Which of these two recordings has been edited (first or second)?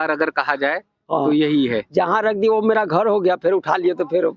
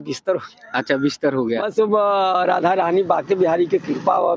second